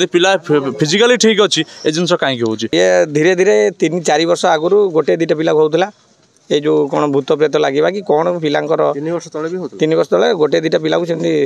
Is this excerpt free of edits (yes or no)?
no